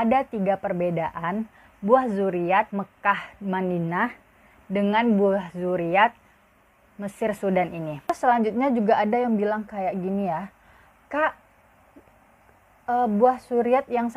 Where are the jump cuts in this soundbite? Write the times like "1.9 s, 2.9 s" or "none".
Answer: 2.7 s, 8.1 s